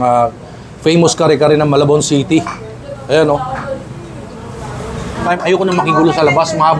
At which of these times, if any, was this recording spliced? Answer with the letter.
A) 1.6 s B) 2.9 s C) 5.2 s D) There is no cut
C